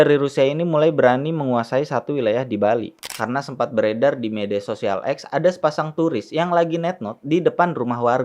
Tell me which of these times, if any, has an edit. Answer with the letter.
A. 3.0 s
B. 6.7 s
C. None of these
A